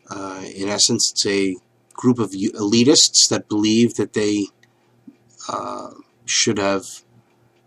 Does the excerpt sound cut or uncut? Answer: uncut